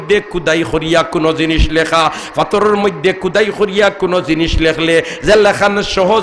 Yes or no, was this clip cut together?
no